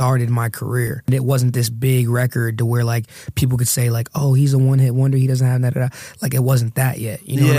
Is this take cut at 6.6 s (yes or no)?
no